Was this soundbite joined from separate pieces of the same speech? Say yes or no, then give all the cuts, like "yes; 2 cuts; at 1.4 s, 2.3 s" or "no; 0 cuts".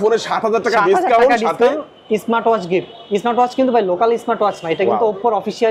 no; 0 cuts